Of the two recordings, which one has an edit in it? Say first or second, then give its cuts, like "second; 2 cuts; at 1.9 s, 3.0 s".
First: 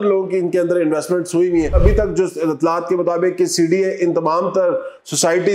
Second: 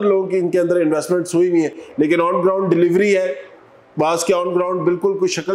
first; 1 cut; at 1.7 s